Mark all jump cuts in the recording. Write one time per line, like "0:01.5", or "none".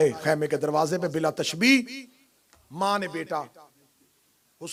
none